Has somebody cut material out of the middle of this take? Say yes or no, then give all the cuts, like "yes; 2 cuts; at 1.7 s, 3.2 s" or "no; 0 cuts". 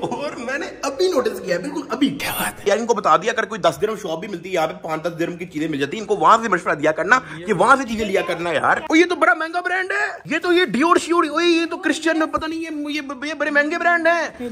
no; 0 cuts